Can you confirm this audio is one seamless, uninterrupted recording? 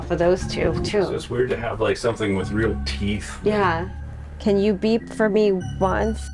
no; 1 cut; at 4.0 s

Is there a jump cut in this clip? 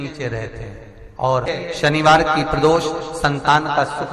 yes; 1 cut; at 1.5 s

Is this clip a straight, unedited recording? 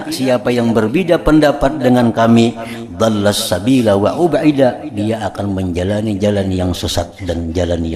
yes; 0 cuts

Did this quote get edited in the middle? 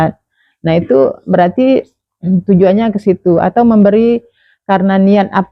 no; 0 cuts

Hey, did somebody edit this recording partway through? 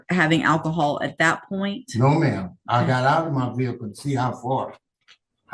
no; 0 cuts

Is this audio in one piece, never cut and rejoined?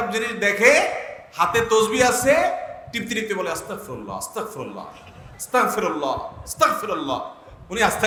yes; 0 cuts

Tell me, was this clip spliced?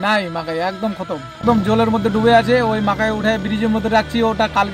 yes; 1 cut; at 1.3 s

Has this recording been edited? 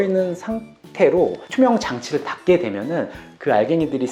yes; 1 cut; at 1.4 s

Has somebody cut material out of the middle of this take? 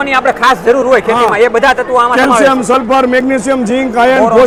no; 0 cuts

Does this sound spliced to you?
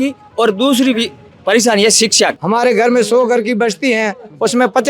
yes; 1 cut; at 2.4 s

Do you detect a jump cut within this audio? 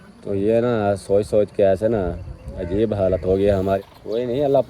yes; 1 cut; at 3.8 s

